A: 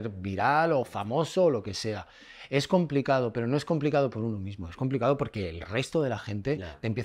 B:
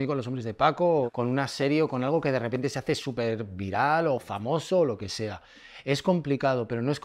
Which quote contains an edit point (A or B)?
B